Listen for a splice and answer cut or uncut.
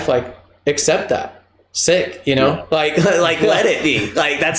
uncut